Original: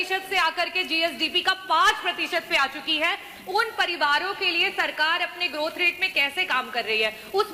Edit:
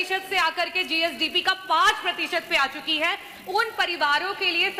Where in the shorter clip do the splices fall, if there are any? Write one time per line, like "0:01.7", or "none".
none